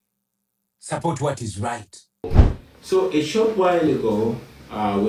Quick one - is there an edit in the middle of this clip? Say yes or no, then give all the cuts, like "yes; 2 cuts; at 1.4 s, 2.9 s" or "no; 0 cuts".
yes; 1 cut; at 2.4 s